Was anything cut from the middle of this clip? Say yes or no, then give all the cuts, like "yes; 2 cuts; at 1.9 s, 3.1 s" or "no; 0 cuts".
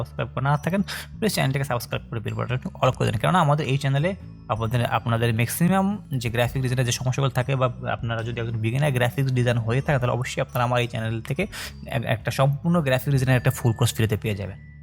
no; 0 cuts